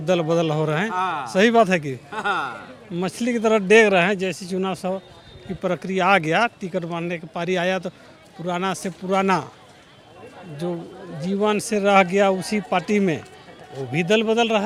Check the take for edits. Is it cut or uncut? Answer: uncut